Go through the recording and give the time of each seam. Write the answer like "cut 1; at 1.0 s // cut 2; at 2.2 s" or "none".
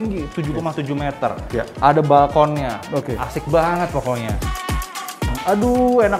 cut 1; at 4.8 s

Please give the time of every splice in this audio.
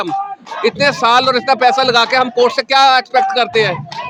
none

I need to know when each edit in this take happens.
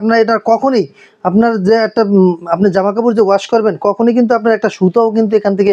none

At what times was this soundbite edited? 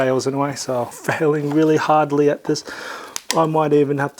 cut 1; at 1.0 s

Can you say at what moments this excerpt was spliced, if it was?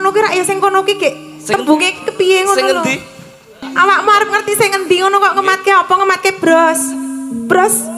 cut 1; at 3.6 s

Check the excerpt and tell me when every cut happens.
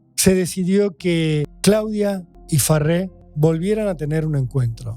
cut 1; at 1.5 s // cut 2; at 2.3 s // cut 3; at 3.2 s

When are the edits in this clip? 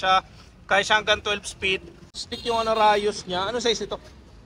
cut 1; at 2.2 s

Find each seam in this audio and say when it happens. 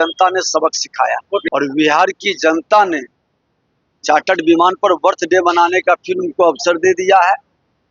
cut 1; at 1.5 s

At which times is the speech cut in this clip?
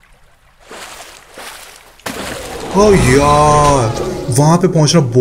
cut 1; at 1.9 s // cut 2; at 4.2 s

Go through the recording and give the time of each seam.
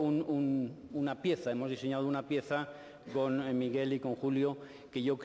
cut 1; at 2.0 s

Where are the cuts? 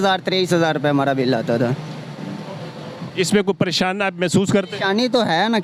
none

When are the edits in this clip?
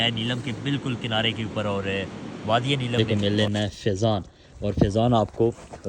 cut 1; at 3.0 s

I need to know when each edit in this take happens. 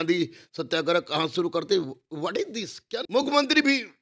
cut 1; at 3.0 s

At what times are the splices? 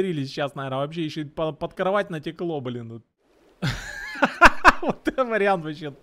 cut 1; at 3.0 s

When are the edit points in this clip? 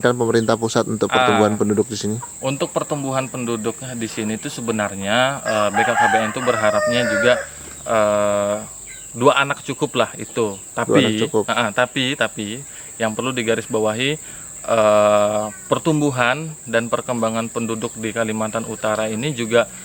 none

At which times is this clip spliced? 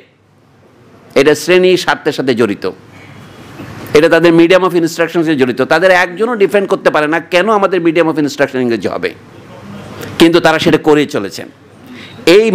none

